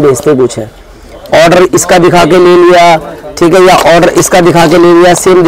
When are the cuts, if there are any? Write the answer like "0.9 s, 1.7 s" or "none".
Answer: none